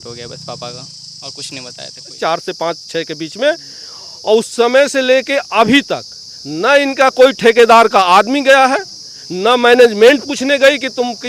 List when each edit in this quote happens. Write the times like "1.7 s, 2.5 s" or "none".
2.1 s